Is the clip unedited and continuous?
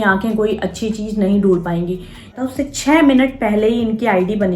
no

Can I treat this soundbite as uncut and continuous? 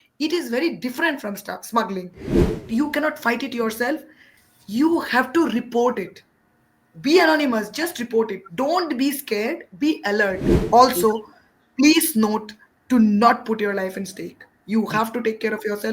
no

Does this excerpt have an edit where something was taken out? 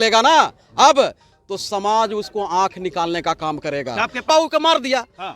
yes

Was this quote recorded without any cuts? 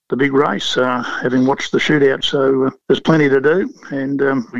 no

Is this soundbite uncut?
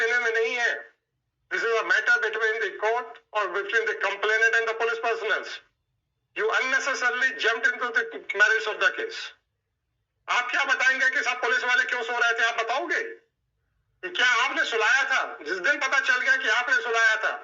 yes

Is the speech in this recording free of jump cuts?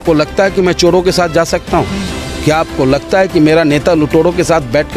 yes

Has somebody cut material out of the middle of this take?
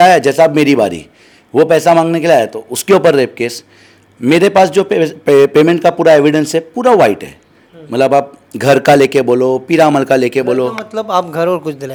no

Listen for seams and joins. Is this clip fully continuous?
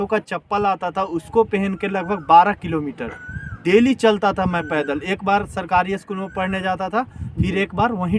yes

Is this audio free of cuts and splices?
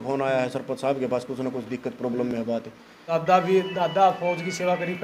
no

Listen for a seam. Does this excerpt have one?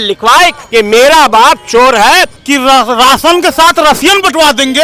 yes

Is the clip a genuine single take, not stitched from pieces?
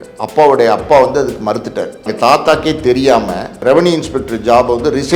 no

